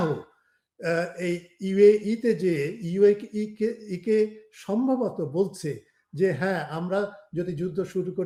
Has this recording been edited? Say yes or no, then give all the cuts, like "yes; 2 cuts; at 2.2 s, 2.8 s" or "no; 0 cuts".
no; 0 cuts